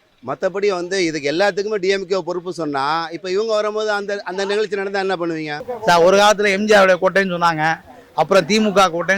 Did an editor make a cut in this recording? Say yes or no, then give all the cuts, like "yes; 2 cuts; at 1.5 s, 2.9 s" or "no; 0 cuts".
yes; 1 cut; at 5.6 s